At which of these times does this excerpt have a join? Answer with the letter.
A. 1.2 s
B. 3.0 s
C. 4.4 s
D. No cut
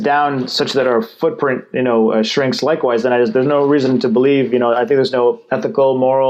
D